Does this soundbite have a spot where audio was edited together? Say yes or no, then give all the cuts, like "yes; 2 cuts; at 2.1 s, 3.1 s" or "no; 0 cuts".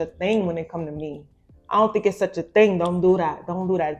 no; 0 cuts